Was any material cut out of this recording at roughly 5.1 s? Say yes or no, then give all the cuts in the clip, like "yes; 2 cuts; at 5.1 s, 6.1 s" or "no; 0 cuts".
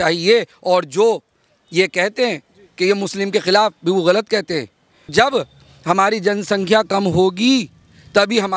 yes; 1 cut; at 5.1 s